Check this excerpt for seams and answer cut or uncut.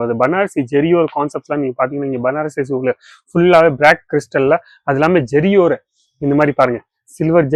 uncut